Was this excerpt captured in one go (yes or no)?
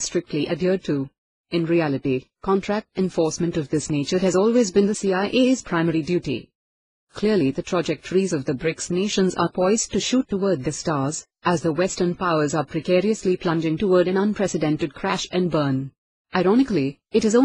no